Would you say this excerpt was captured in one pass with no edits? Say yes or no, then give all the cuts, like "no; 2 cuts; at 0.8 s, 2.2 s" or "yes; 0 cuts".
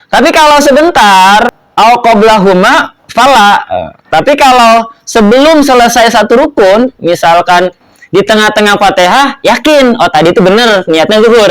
no; 1 cut; at 1.6 s